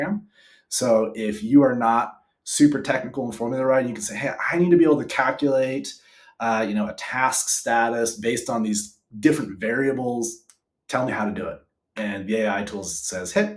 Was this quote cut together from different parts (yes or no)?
no